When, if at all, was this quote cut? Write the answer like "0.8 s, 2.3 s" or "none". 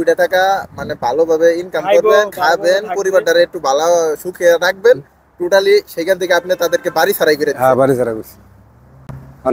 none

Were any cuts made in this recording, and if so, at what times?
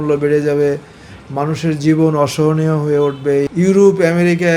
3.5 s

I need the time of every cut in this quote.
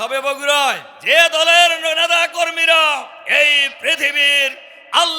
0.9 s, 3.2 s

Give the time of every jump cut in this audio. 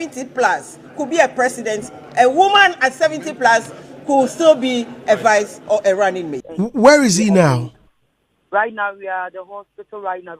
6.4 s

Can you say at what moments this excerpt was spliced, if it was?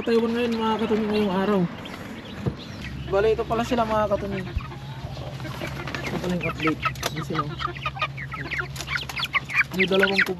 2.7 s

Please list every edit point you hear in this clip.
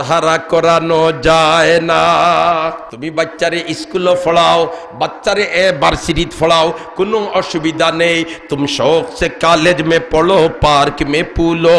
2.9 s

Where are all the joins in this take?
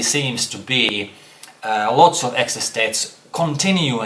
none

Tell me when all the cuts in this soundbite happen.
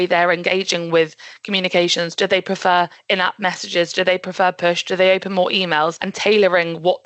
none

